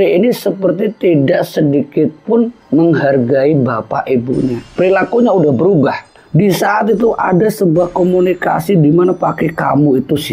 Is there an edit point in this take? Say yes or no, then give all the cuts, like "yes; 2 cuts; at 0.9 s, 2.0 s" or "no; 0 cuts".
yes; 1 cut; at 6.1 s